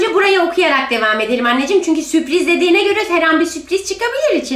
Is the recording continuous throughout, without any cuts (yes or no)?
yes